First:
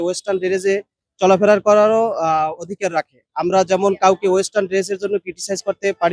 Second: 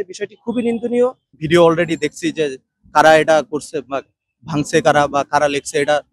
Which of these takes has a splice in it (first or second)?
second